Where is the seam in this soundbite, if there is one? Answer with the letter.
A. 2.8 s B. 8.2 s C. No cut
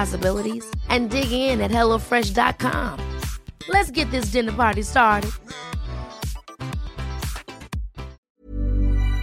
B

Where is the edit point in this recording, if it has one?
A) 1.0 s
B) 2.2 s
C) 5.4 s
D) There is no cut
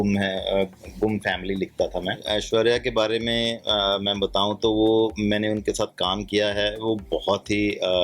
B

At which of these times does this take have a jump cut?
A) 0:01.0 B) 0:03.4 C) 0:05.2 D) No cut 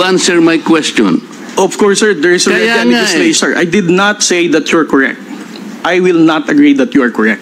B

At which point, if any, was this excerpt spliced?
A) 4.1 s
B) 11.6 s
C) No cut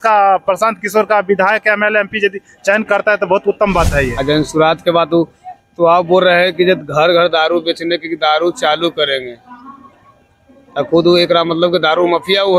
A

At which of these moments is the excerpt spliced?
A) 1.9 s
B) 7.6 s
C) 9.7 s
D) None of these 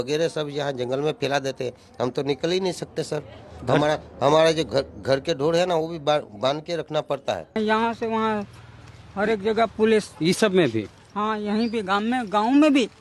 B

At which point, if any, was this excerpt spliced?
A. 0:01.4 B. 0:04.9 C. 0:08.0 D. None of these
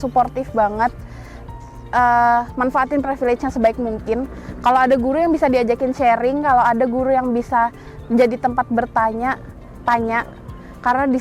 D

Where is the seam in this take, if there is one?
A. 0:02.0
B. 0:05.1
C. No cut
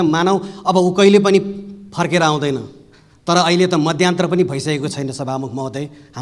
C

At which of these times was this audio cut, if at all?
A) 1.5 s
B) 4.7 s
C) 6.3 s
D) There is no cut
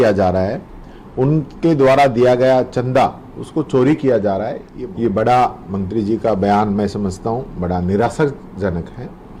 B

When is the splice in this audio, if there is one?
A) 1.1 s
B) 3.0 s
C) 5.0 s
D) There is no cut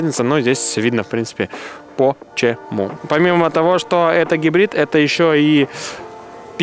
B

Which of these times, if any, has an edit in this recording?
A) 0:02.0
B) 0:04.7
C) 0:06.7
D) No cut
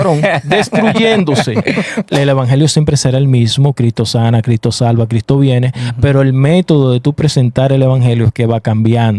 A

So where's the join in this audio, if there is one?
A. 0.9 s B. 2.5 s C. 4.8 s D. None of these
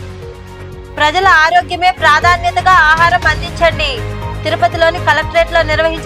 A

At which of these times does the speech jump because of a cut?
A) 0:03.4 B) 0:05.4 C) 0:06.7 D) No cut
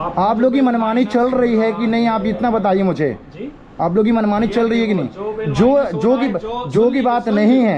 D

